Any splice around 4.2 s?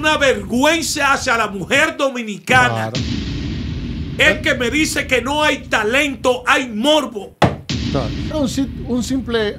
no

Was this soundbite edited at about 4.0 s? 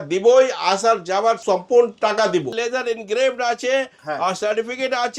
no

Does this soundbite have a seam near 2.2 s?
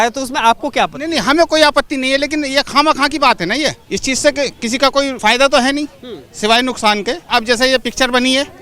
no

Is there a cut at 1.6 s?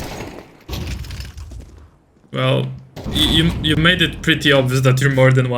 no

